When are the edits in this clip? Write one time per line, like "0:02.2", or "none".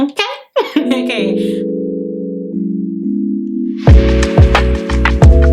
0:00.9